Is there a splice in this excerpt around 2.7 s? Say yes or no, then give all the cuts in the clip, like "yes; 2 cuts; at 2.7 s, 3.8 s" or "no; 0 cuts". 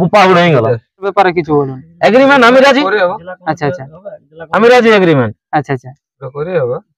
no; 1 cut; at 1.1 s